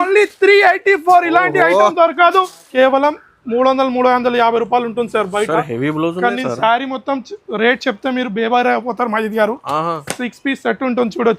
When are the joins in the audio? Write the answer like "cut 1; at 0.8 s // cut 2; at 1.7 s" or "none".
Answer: cut 1; at 2.6 s